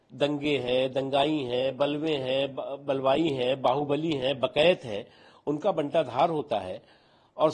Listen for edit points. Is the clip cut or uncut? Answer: uncut